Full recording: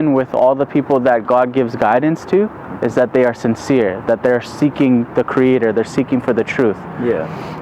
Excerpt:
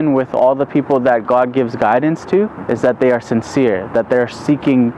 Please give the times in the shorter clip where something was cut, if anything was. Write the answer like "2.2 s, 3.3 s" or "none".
2.6 s